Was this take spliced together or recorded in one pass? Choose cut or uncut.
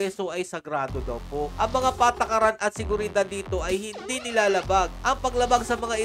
uncut